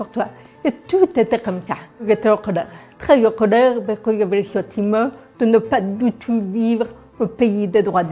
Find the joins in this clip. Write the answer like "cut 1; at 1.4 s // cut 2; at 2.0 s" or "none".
cut 1; at 2.0 s // cut 2; at 2.9 s